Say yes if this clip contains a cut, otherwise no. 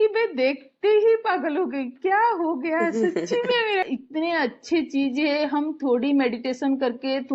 yes